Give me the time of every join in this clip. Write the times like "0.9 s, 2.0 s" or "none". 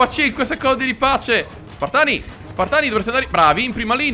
none